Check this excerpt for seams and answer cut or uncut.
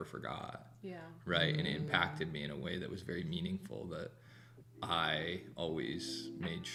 uncut